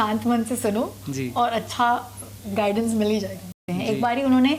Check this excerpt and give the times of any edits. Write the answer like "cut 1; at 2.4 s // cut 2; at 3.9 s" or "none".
cut 1; at 3.6 s